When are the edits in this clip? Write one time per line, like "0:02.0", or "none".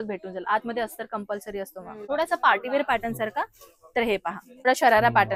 0:02.0
0:04.7